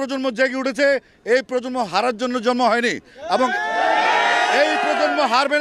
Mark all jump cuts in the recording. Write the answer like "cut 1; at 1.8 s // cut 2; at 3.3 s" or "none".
none